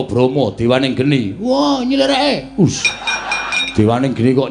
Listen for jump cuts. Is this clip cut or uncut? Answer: cut